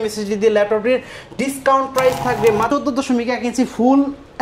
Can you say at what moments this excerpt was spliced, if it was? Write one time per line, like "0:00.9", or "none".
0:02.7